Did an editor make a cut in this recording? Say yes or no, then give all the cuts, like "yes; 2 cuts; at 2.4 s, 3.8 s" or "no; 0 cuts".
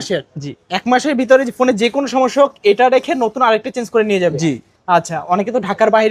no; 0 cuts